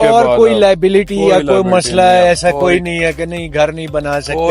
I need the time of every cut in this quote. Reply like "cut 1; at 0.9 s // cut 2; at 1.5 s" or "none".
none